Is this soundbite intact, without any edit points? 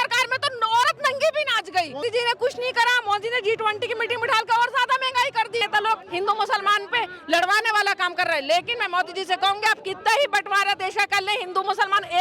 no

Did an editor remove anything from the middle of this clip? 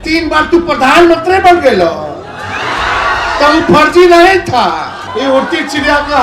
yes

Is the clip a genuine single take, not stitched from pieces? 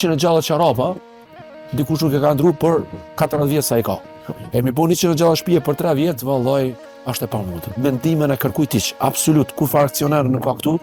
yes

